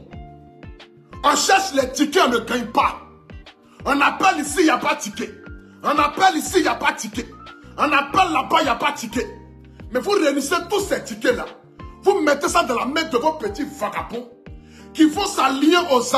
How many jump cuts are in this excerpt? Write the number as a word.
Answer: zero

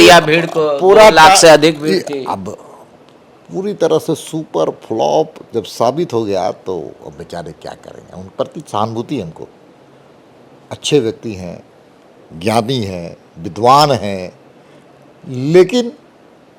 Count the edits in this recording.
zero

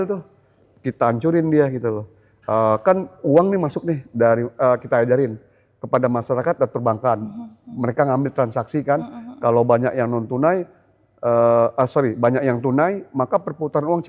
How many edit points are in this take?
zero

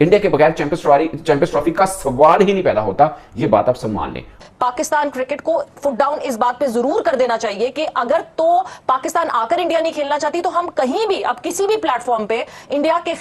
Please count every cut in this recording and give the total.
one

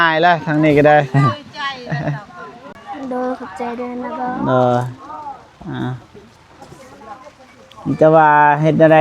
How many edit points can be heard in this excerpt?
one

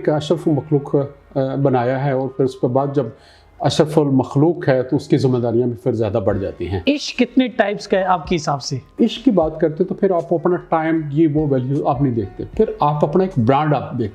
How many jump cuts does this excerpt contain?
two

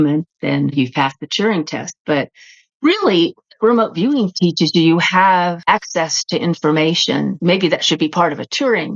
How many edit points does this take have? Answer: two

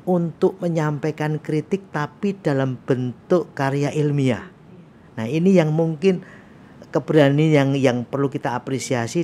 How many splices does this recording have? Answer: zero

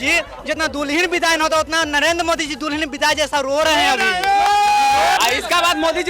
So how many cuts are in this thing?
one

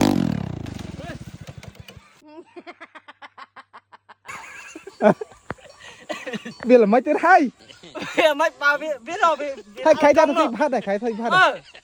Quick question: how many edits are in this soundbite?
zero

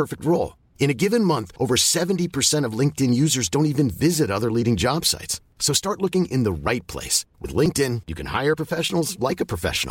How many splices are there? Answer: zero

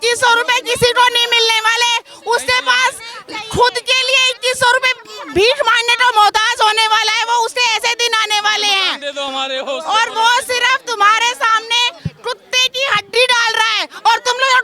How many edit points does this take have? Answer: zero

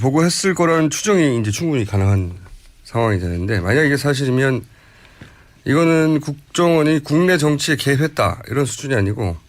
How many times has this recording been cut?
zero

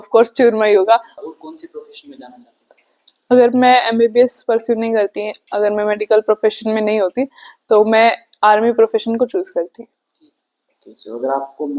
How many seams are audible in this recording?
one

